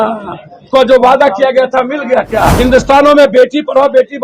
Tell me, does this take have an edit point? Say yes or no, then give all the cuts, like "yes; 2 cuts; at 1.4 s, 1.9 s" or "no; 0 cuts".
yes; 1 cut; at 2.5 s